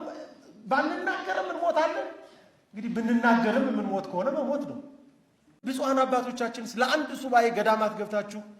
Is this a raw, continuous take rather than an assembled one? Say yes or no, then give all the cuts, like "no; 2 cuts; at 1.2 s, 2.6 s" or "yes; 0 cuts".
no; 1 cut; at 5.5 s